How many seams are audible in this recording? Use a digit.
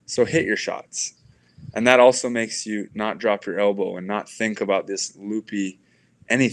0